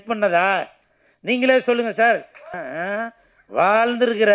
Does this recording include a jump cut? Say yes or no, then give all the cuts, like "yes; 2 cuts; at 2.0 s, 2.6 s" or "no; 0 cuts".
yes; 1 cut; at 2.4 s